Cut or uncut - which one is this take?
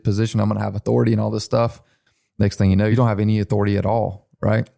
cut